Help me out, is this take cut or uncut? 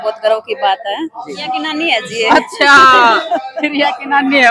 cut